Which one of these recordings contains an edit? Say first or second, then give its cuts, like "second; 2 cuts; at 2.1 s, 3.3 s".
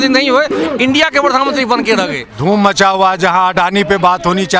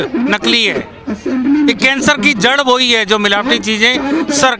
first; 1 cut; at 2.2 s